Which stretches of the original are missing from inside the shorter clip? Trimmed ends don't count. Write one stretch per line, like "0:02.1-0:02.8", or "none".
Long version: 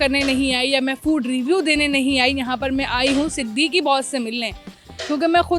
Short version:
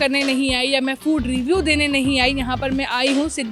none